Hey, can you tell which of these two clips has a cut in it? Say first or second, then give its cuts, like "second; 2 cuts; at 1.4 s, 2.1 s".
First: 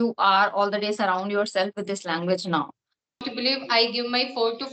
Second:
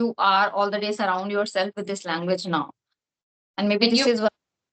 first; 1 cut; at 3.3 s